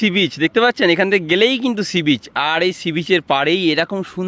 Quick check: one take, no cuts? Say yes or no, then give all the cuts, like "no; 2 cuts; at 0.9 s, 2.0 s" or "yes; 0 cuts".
yes; 0 cuts